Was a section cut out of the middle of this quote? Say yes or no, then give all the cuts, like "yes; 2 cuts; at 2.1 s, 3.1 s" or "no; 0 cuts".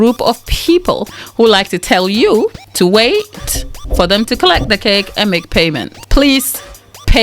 yes; 3 cuts; at 1.2 s, 2.6 s, 5.9 s